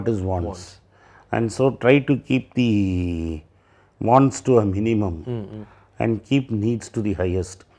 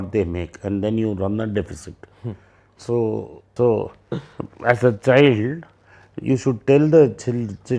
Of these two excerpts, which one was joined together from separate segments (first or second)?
second